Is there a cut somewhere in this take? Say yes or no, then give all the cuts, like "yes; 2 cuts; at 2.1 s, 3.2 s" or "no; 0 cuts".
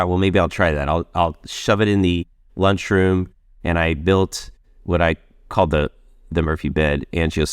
yes; 1 cut; at 6.5 s